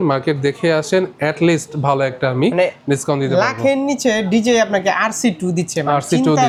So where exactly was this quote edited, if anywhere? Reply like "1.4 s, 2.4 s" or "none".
none